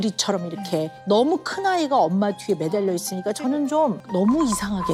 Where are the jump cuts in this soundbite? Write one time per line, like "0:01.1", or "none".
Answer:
0:04.0